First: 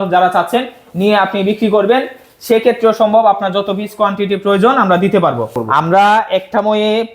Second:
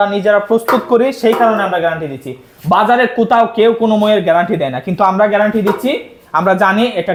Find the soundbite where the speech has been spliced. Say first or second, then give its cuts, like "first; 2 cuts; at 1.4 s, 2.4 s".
first; 1 cut; at 5.5 s